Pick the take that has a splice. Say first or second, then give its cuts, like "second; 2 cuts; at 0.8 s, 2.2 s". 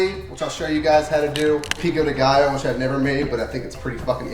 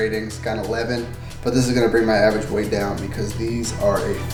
first; 1 cut; at 1.8 s